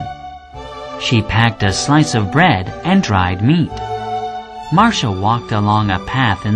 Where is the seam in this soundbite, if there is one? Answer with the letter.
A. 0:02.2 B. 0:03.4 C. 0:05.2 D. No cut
B